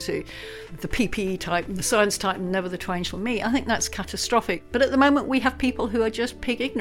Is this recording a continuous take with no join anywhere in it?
no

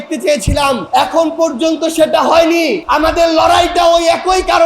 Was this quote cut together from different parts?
yes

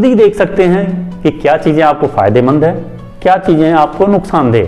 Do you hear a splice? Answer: no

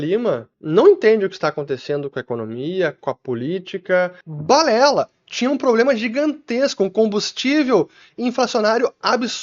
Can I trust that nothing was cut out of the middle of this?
no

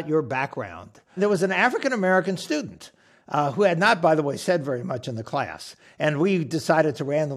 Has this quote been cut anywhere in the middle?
yes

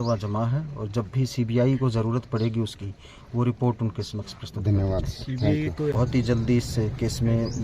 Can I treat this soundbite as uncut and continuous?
no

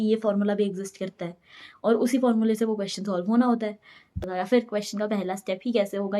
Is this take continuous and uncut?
no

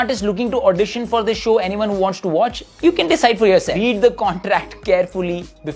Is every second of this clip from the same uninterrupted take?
no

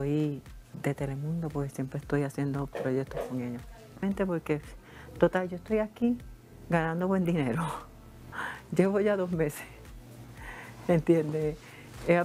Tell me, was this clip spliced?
yes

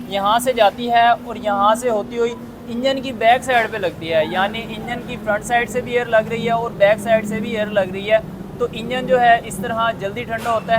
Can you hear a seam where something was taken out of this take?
no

